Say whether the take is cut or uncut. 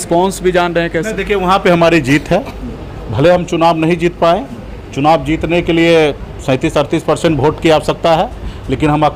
uncut